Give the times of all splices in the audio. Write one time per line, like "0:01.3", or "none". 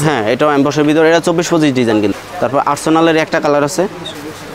0:02.2